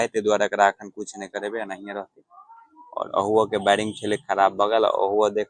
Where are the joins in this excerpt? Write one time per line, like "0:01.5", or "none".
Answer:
none